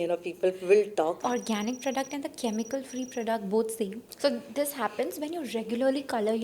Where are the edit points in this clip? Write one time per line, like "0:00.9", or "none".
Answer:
0:01.2
0:04.1